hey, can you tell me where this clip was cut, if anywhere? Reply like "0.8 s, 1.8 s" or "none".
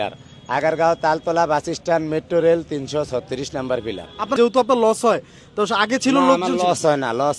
4.4 s

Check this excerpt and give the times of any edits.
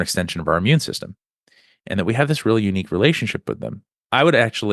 none

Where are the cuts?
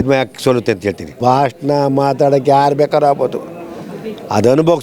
1.2 s

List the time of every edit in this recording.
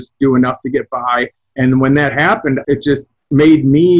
1.5 s, 2.7 s

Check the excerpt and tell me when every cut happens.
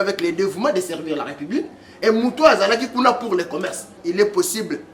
3.9 s

